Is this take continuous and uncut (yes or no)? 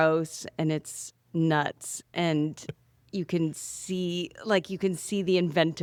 yes